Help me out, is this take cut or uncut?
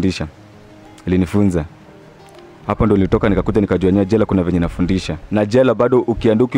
cut